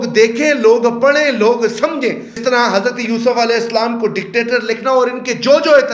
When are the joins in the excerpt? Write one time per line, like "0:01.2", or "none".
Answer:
0:02.4